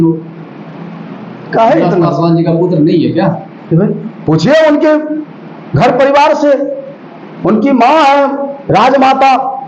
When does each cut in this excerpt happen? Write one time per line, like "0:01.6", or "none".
none